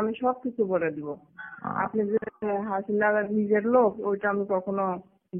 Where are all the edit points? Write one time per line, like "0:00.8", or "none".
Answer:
none